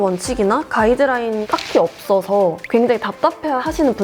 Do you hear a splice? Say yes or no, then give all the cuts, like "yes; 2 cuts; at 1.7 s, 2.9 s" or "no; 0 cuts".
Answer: yes; 1 cut; at 1.4 s